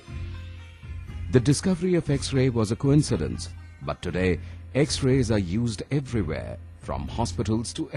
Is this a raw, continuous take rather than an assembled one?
no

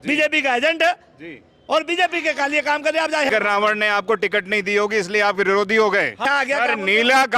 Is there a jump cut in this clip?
yes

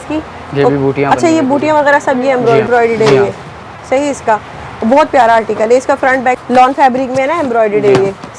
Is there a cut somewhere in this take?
yes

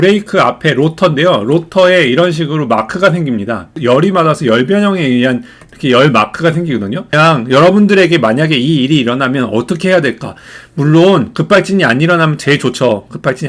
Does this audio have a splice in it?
yes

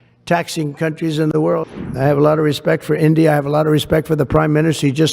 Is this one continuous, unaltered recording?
no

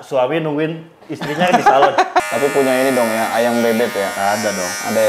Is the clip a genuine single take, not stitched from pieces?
no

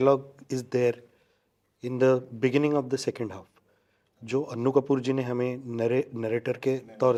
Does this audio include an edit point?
no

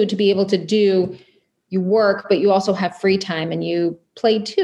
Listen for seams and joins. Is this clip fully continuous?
yes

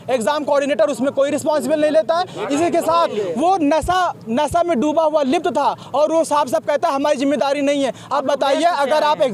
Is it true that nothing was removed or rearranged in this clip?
yes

